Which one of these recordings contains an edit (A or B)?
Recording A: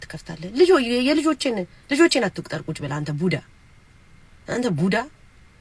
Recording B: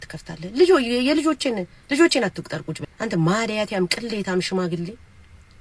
B